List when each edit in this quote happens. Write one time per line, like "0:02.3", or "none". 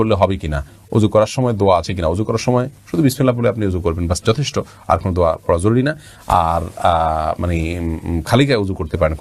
none